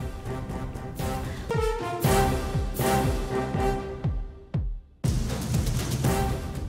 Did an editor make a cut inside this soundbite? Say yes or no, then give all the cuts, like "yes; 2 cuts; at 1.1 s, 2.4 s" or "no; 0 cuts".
yes; 1 cut; at 5.7 s